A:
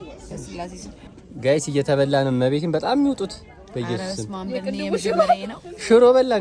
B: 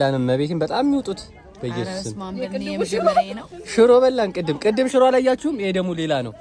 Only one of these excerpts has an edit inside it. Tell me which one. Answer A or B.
A